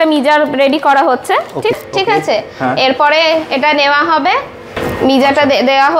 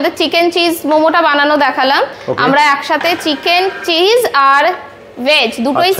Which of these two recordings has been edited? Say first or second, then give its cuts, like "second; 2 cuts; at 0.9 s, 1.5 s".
first; 2 cuts; at 1.7 s, 4.7 s